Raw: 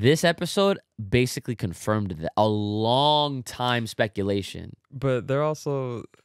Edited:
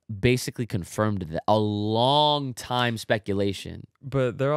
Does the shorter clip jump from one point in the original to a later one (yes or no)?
no